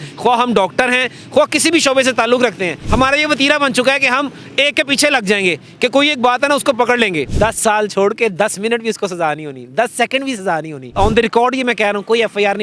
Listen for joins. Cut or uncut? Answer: cut